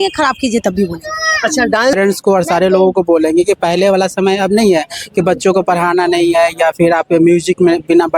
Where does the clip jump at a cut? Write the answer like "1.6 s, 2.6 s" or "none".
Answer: 2.0 s